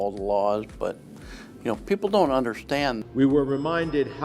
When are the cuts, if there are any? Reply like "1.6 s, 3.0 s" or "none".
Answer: 3.0 s

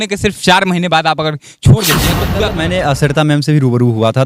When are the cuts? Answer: 2.3 s

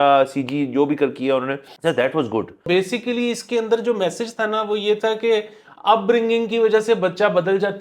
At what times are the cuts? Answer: 1.7 s, 2.6 s

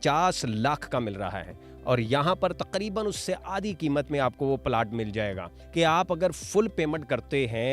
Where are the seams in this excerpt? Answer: 5.6 s

